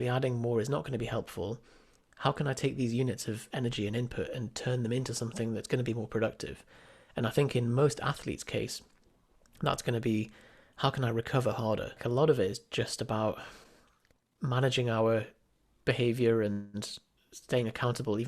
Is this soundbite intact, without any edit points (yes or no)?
no